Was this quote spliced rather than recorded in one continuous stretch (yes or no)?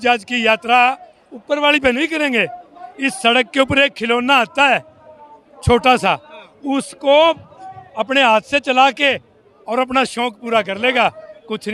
no